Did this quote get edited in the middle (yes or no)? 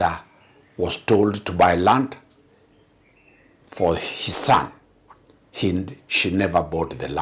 no